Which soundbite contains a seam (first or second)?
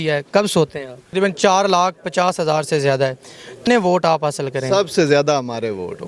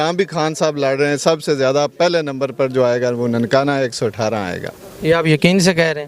first